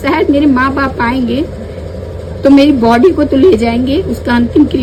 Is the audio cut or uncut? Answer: uncut